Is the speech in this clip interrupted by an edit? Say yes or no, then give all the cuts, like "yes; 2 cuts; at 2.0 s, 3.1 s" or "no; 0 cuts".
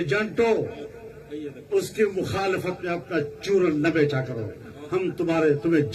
no; 0 cuts